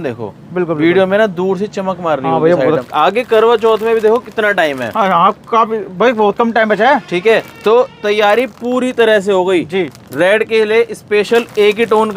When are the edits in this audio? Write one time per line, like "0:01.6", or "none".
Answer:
0:02.9